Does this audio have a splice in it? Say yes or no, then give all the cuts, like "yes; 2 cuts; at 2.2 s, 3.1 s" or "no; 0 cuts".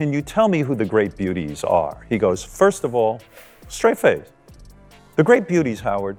no; 0 cuts